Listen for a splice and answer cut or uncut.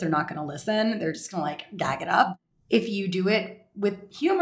cut